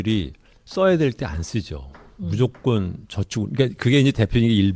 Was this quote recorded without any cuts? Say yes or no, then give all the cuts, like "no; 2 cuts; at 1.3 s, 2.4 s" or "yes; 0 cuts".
no; 1 cut; at 1.0 s